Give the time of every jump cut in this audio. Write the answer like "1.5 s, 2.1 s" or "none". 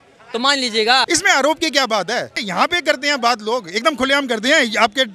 1.1 s, 2.5 s